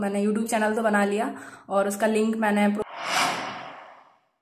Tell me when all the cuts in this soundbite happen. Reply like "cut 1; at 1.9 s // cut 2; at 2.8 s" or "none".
cut 1; at 2.8 s

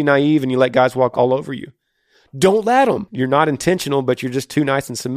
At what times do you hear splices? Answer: cut 1; at 1.1 s // cut 2; at 3.1 s

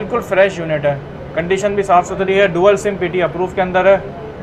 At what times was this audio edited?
none

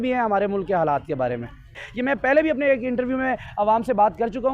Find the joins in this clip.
cut 1; at 1.9 s

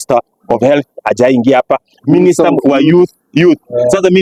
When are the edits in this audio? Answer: none

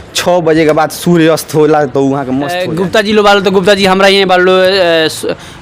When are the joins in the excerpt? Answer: cut 1; at 2.5 s

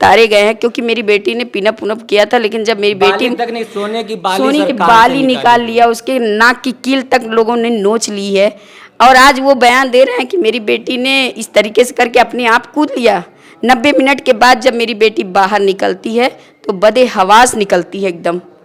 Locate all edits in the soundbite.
none

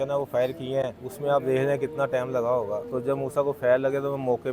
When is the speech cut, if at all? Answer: cut 1; at 1.0 s // cut 2; at 2.9 s

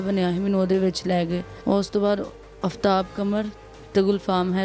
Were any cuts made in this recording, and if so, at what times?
cut 1; at 1.5 s

